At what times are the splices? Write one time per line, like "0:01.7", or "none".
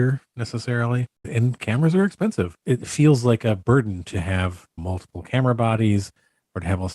0:01.3
0:02.6

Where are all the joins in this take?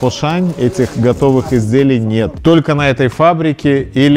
0:02.3

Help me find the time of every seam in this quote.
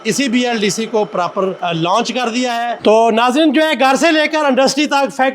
0:01.6
0:02.8

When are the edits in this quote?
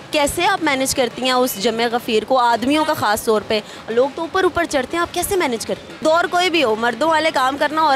0:06.0

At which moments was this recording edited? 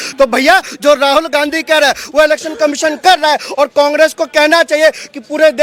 none

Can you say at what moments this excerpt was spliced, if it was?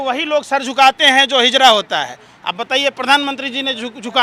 none

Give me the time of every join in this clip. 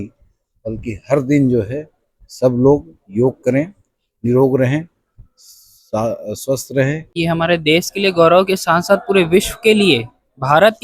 0:07.1

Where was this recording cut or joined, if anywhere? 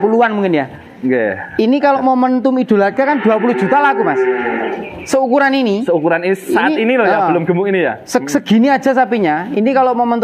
none

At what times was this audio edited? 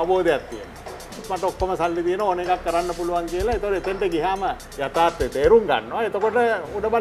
0:01.3
0:04.7

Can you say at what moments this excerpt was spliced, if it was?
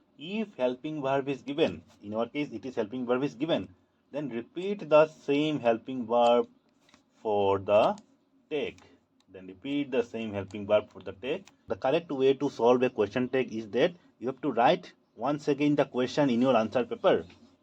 0:11.7

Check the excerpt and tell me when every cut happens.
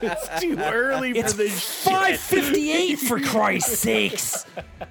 none

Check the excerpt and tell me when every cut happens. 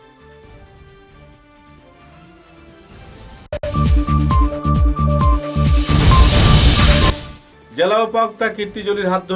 0:03.6
0:07.1

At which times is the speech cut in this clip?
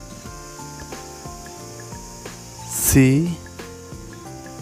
0:02.7
0:03.4

